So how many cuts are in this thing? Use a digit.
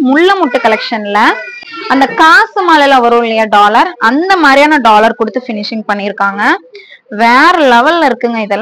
0